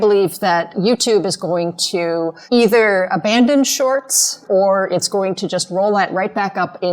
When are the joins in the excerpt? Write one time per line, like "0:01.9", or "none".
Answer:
0:02.4
0:04.4